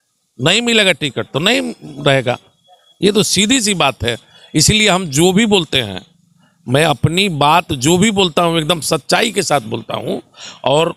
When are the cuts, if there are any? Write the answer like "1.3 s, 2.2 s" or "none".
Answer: none